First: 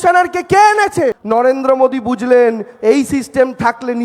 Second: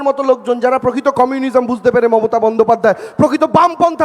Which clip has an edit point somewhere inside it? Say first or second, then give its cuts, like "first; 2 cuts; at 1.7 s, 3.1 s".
first; 1 cut; at 1.2 s